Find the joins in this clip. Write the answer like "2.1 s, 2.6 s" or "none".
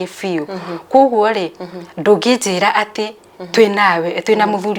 none